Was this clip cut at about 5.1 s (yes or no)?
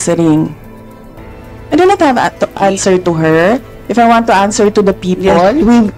no